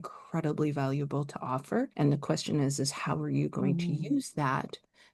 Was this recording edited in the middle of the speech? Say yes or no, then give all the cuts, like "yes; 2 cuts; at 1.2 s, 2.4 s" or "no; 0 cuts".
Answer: yes; 1 cut; at 1.9 s